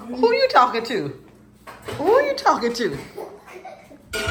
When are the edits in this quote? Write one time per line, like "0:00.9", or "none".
none